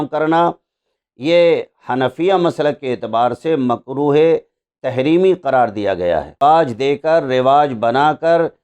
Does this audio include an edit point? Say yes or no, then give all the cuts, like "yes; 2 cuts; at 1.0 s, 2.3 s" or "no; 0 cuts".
yes; 1 cut; at 6.4 s